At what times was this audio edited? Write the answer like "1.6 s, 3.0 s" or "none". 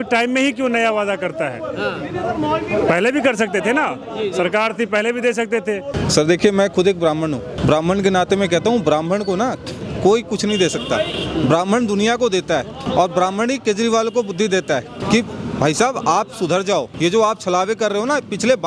6.0 s, 7.5 s, 12.8 s, 15.0 s, 16.9 s